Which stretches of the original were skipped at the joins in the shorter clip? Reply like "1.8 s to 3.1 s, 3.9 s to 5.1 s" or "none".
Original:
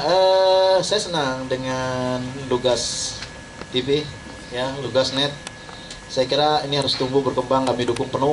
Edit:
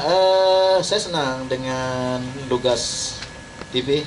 none